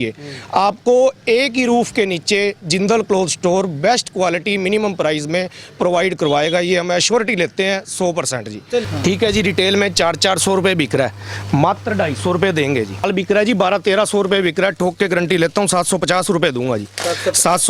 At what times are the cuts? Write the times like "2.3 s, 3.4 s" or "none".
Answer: 8.8 s, 13.1 s